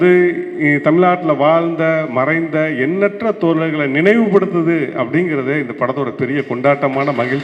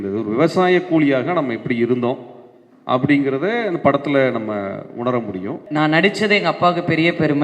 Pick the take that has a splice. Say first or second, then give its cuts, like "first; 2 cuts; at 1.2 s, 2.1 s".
second; 1 cut; at 5.6 s